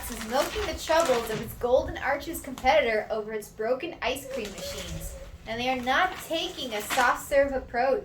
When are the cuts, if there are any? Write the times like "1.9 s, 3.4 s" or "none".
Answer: none